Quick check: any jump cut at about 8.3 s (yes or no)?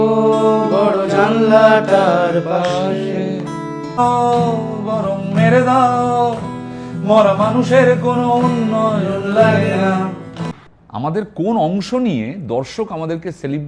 no